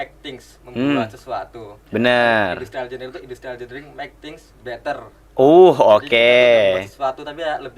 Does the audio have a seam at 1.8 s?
no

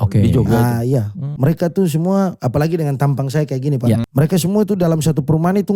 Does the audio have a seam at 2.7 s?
no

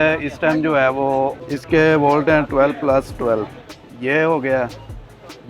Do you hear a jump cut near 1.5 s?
yes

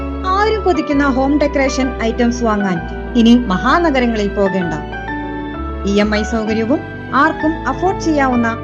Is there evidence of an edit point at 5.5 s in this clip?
no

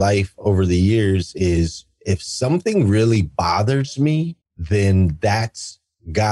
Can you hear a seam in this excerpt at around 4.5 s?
no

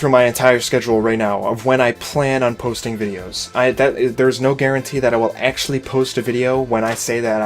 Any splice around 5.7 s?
no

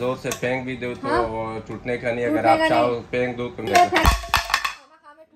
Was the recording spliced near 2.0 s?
no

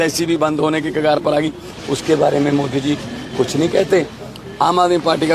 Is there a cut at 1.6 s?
no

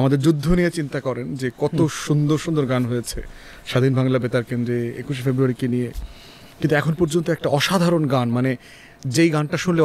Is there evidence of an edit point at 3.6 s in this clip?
no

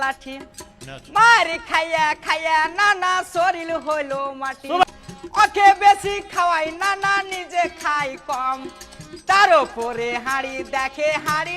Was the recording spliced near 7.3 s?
no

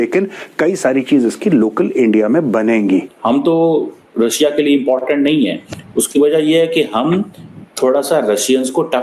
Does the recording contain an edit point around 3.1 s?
yes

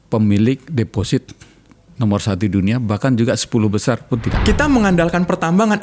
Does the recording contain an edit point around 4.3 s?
yes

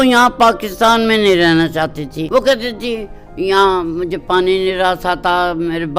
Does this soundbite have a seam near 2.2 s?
yes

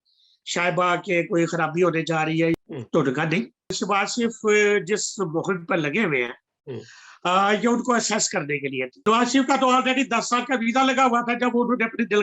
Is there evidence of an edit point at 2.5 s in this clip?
yes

